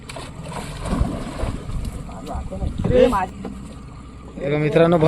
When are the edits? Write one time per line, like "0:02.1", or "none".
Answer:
0:03.3